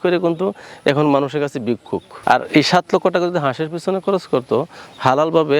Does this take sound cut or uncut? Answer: uncut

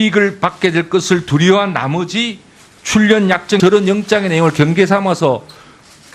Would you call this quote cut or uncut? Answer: uncut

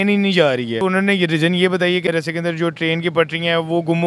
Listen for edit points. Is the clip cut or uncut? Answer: cut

